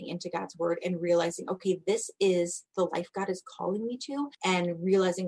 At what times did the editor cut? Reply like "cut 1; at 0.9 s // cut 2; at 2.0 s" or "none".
cut 1; at 4.3 s

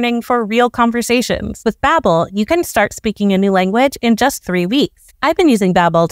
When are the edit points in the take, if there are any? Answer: cut 1; at 1.6 s // cut 2; at 5.0 s

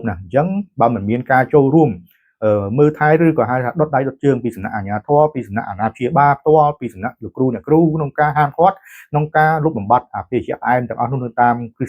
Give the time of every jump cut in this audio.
none

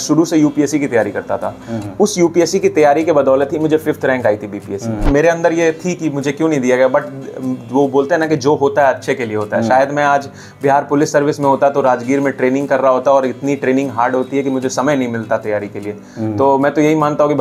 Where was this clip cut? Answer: cut 1; at 5.0 s

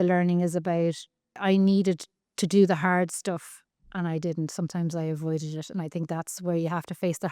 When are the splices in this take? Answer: cut 1; at 1.4 s

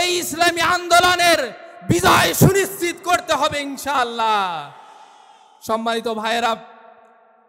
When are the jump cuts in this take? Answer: none

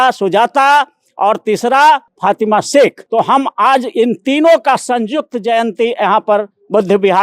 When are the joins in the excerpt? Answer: cut 1; at 2.1 s // cut 2; at 3.0 s

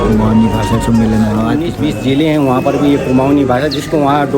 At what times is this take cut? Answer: cut 1; at 1.7 s

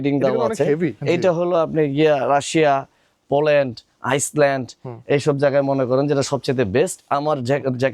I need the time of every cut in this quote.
cut 1; at 1.0 s

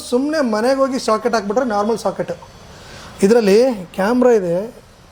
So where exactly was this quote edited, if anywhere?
none

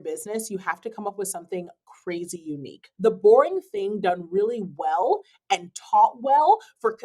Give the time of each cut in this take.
cut 1; at 2.8 s

